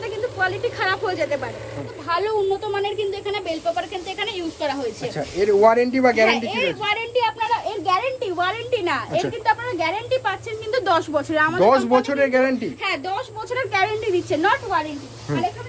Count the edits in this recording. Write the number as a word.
one